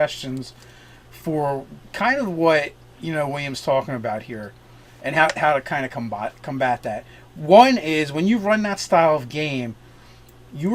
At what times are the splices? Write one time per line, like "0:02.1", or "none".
0:03.9